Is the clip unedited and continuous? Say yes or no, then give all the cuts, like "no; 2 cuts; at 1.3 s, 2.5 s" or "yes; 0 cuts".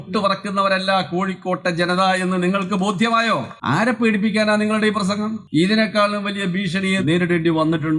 no; 3 cuts; at 3.5 s, 5.4 s, 7.0 s